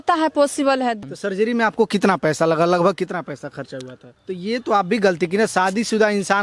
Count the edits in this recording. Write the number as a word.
two